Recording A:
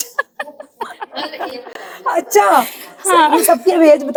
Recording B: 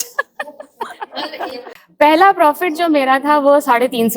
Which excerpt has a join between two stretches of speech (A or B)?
B